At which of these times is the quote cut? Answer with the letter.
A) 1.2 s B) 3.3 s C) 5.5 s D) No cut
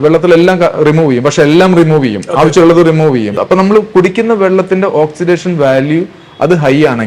B